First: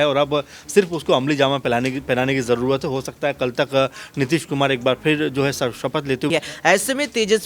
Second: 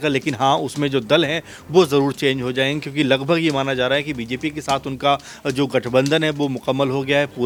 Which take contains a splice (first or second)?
first